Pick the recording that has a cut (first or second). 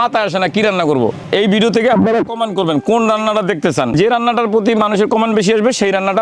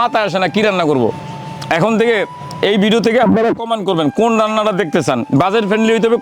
first